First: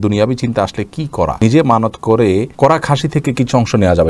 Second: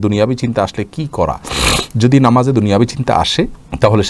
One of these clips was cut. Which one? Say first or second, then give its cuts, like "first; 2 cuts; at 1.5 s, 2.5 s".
first; 2 cuts; at 1.4 s, 2.5 s